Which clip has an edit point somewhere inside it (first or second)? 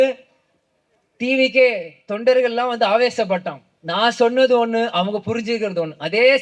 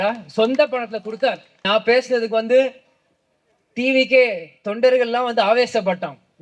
second